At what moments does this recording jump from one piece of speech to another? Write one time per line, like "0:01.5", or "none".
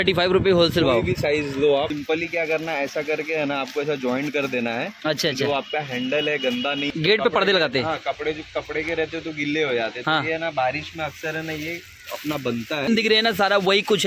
0:01.9
0:06.9
0:12.9